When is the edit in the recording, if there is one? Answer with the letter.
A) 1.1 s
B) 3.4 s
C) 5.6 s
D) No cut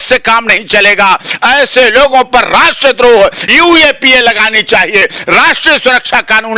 B